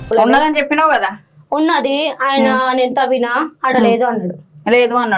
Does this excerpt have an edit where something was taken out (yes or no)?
no